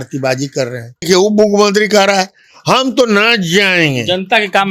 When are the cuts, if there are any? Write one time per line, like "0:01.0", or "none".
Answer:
0:01.0